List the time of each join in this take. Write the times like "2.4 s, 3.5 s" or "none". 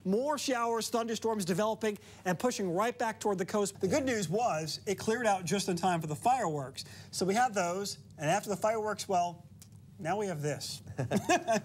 3.7 s

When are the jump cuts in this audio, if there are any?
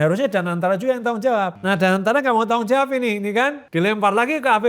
1.6 s, 3.6 s

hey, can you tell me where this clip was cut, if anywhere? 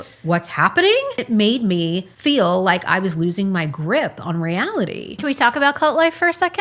1.2 s, 2.1 s, 5.2 s

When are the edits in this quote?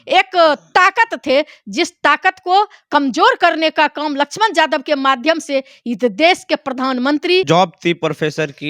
7.4 s

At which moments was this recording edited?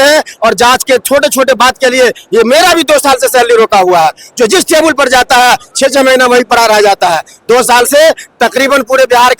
none

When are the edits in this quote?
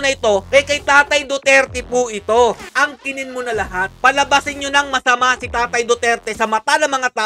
2.7 s

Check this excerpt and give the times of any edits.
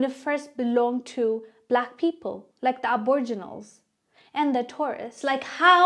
none

